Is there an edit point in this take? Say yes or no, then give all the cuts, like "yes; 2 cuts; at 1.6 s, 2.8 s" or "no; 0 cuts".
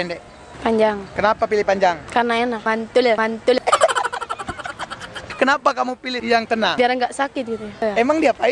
yes; 5 cuts; at 2.6 s, 3.6 s, 5.3 s, 6.1 s, 7.8 s